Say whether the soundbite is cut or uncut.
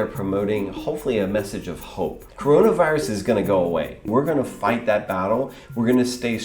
cut